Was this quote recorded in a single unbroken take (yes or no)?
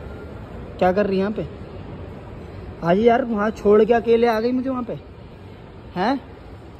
yes